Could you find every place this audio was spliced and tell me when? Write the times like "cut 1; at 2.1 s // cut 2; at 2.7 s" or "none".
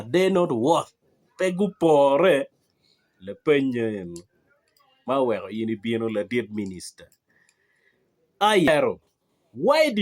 cut 1; at 8.7 s